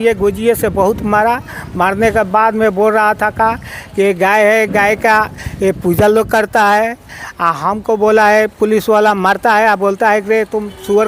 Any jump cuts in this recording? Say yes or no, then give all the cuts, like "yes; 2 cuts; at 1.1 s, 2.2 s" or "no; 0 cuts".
no; 0 cuts